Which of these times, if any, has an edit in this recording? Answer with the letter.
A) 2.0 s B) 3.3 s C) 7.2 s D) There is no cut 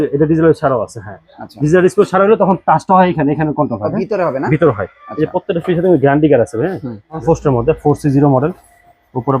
C